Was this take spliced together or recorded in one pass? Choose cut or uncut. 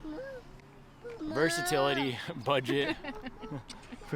uncut